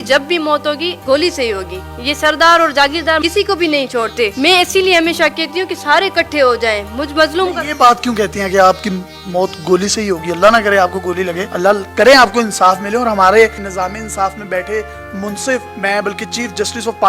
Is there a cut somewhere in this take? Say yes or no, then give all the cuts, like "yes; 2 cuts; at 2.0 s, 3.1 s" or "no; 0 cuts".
no; 0 cuts